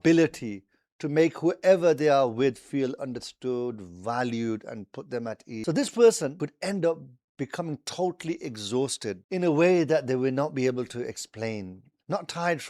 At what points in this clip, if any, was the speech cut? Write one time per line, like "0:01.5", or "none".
0:05.6
0:06.3
0:09.2